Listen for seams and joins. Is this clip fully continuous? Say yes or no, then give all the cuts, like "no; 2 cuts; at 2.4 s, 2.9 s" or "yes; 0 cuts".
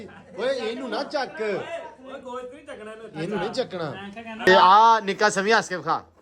no; 1 cut; at 4.5 s